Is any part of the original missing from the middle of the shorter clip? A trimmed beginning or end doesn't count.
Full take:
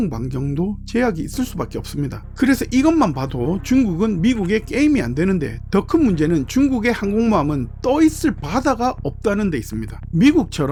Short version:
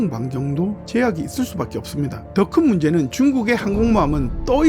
yes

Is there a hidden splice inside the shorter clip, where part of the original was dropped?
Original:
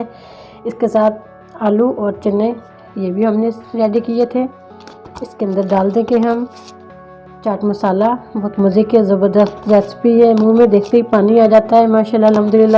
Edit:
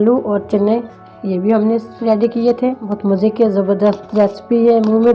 yes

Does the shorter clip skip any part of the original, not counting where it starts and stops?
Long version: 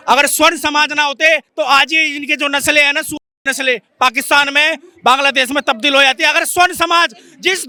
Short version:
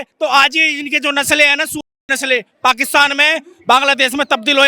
no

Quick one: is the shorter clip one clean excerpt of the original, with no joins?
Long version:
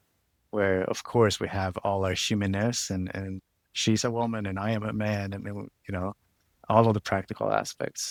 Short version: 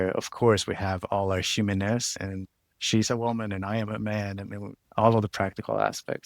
no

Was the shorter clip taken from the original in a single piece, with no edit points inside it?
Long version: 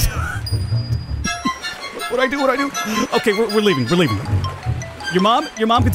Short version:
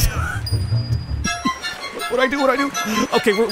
yes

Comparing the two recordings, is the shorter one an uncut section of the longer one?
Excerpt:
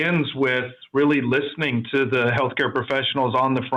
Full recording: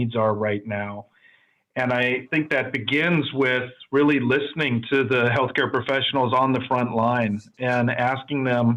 yes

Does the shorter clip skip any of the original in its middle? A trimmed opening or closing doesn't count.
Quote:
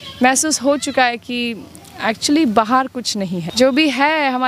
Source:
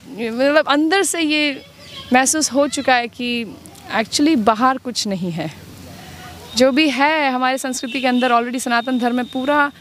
yes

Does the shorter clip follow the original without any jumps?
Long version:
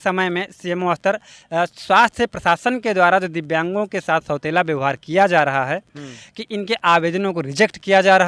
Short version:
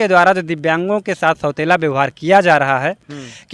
yes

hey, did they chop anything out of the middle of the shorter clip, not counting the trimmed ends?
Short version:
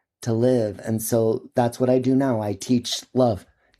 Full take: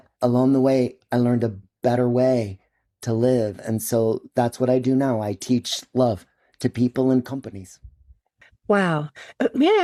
no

